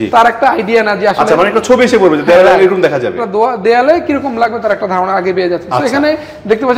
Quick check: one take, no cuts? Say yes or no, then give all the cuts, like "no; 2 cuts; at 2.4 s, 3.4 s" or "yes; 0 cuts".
yes; 0 cuts